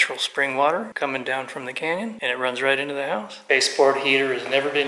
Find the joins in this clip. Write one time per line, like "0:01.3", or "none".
0:00.9
0:02.2
0:03.3